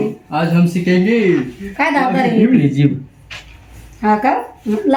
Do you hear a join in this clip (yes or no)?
no